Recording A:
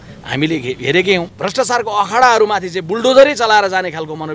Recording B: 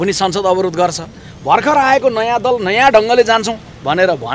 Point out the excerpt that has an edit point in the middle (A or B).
A